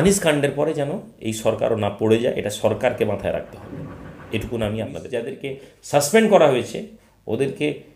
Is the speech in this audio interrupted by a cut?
yes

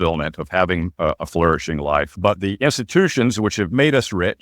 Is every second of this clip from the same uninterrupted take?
no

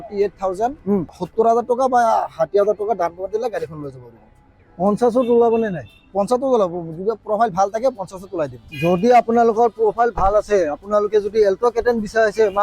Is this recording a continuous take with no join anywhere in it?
no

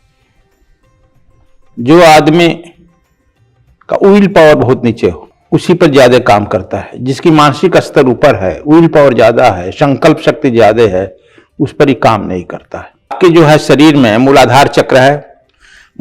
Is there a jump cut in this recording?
yes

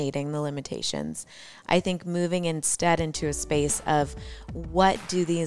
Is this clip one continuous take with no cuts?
yes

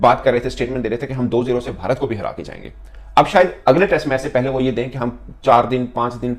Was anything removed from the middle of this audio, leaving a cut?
no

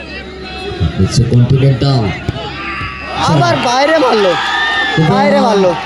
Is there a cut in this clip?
no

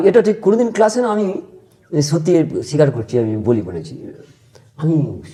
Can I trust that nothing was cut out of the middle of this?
yes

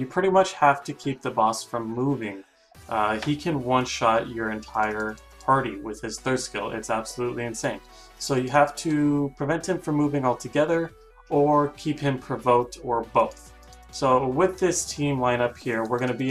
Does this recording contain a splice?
no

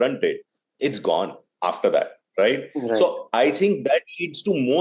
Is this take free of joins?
yes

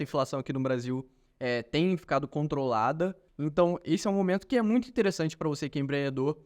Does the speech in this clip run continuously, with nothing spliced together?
no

